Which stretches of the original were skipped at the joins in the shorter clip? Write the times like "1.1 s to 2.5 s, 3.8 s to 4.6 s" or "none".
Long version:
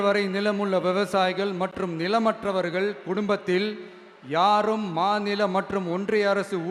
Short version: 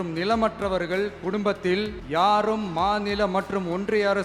3.8 s to 4.2 s